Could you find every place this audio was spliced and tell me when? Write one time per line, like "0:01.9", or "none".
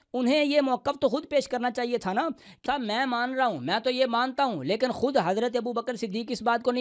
0:02.6